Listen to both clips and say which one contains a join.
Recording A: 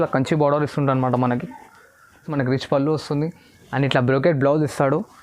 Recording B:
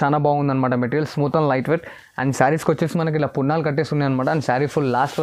A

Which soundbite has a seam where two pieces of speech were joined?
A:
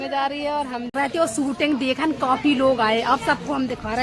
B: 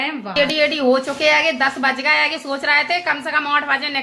A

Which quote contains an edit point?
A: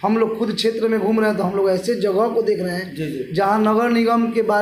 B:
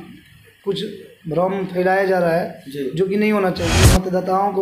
B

